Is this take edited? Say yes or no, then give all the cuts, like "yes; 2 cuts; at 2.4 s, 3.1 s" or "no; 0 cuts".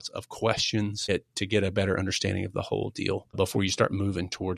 yes; 2 cuts; at 1.1 s, 3.4 s